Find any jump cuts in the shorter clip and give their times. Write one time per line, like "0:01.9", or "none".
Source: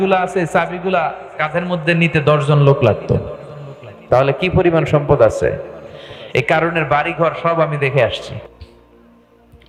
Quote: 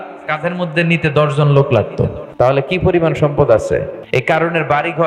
0:02.4
0:04.1